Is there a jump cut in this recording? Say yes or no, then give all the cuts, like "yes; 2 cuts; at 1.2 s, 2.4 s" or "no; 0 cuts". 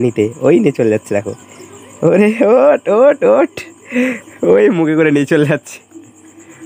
no; 0 cuts